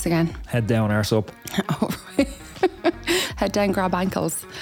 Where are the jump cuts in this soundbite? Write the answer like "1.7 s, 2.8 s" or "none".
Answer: 3.3 s